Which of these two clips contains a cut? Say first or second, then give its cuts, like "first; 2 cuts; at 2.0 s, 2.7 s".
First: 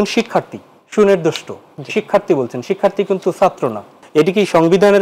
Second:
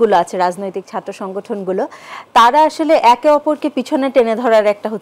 first; 1 cut; at 4.0 s